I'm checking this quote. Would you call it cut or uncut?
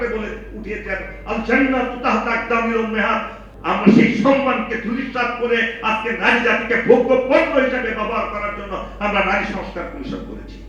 cut